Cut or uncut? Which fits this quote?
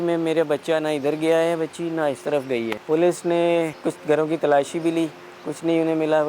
cut